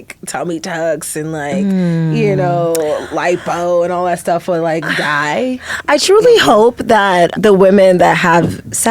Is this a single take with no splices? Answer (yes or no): no